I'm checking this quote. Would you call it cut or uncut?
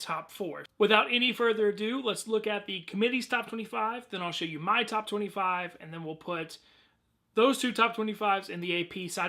cut